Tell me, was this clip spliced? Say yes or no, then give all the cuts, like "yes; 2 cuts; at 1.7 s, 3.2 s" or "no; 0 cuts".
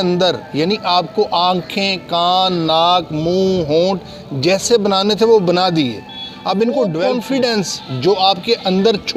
yes; 1 cut; at 7.0 s